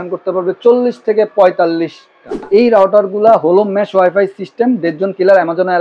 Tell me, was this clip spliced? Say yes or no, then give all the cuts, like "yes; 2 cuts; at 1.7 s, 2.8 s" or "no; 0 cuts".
yes; 1 cut; at 2.4 s